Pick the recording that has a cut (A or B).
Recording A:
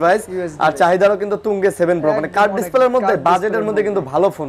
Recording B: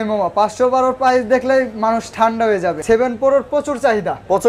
B